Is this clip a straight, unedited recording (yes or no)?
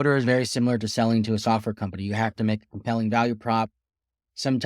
yes